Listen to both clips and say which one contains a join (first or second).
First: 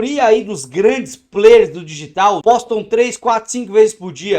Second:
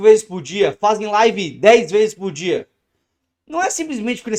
first